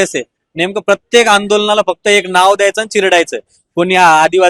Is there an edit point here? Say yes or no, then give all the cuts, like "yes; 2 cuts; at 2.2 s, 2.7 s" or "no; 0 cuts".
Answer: no; 0 cuts